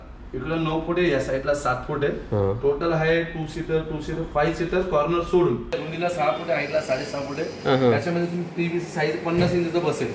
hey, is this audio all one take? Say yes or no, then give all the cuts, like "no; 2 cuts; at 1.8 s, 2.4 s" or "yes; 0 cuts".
no; 1 cut; at 5.7 s